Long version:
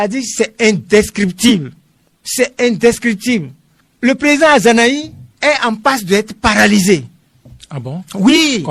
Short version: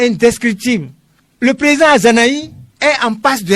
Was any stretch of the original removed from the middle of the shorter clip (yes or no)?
no